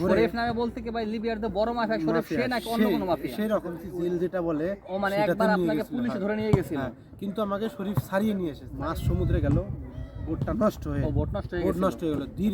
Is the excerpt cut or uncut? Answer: cut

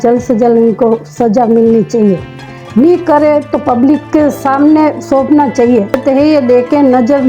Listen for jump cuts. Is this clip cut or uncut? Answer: cut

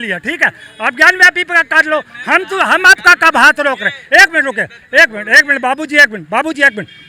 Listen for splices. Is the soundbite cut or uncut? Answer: uncut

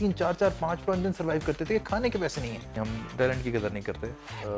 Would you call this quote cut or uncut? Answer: cut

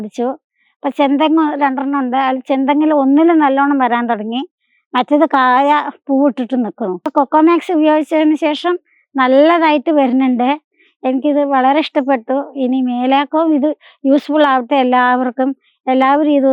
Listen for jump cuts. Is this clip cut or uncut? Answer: cut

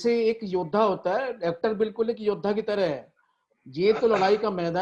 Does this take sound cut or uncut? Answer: uncut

